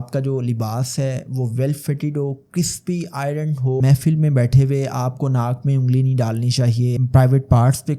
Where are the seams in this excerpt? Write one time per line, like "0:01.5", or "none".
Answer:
0:03.8
0:07.0